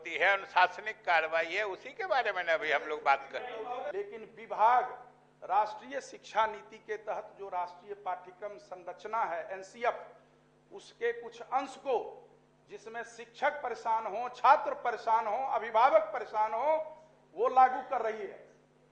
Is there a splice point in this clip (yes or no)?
yes